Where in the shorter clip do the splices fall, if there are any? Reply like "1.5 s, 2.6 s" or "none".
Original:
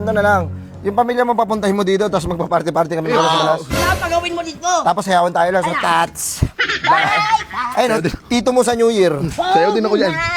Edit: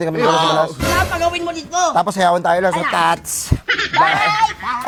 none